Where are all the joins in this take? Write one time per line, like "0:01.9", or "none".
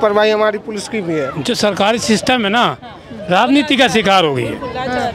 0:01.3